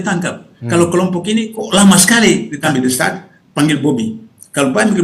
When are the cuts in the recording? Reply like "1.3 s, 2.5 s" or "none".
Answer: 2.5 s